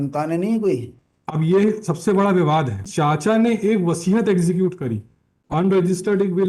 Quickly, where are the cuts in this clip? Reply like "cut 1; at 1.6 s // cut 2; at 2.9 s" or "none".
cut 1; at 2.9 s // cut 2; at 4.8 s